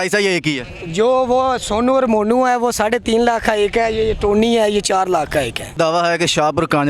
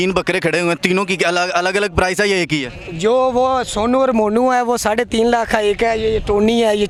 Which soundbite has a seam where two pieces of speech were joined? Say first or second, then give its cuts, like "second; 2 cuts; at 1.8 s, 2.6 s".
first; 1 cut; at 5.8 s